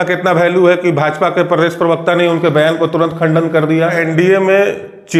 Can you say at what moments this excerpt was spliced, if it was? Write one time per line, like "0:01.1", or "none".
0:04.0